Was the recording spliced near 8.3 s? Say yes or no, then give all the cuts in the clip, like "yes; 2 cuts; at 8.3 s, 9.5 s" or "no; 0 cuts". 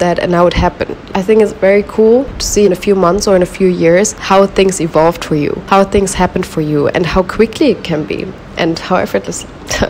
no; 4 cuts; at 1.1 s, 2.6 s, 4.2 s, 5.6 s